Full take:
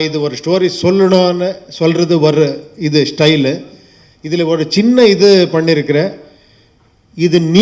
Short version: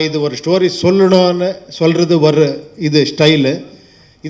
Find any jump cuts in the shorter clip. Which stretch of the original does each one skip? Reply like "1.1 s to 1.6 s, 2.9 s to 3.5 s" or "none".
none